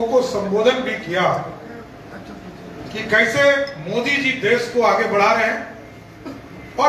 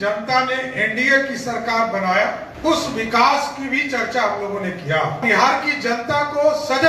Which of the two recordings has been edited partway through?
second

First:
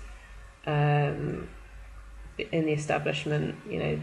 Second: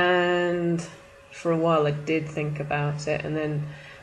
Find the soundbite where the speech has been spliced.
first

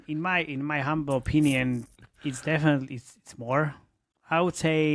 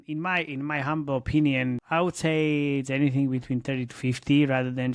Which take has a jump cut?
second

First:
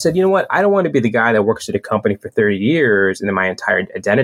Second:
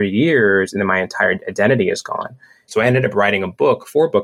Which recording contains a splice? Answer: second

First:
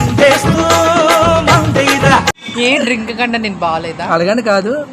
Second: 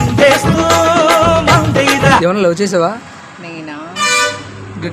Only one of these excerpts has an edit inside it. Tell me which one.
second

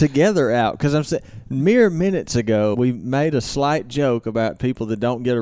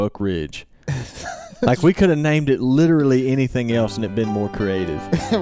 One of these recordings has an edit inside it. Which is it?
first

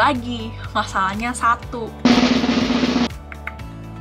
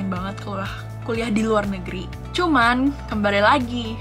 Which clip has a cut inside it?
second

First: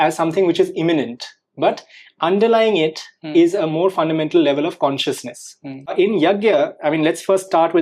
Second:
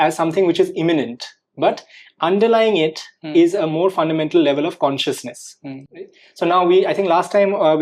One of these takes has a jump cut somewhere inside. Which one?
first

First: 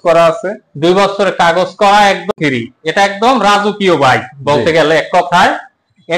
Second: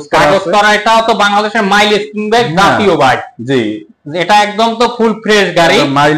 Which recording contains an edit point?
first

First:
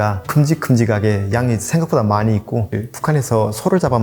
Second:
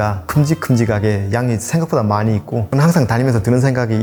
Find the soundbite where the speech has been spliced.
first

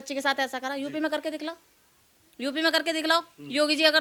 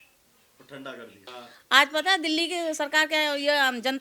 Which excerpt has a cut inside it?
second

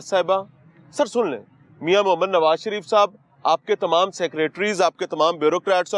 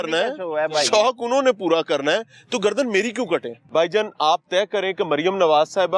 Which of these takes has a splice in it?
second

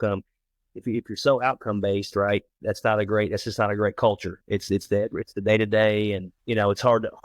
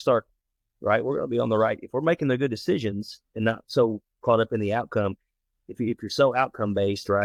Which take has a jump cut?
first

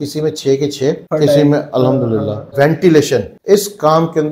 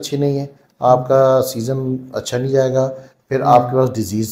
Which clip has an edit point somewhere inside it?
first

